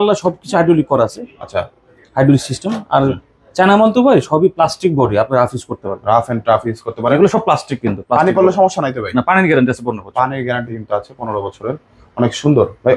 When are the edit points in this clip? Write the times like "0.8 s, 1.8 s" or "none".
none